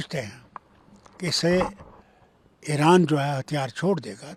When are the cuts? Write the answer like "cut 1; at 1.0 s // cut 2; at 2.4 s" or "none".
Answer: none